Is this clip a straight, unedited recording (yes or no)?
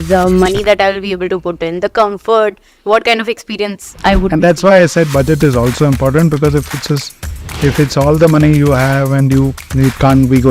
no